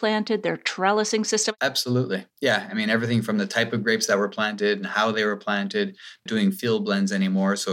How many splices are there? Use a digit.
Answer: 1